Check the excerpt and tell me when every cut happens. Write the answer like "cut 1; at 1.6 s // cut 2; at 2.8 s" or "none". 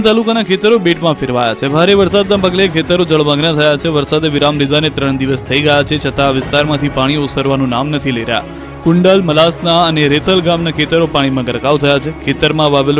cut 1; at 5.6 s